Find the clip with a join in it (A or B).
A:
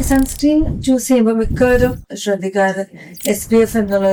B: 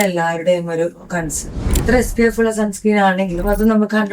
B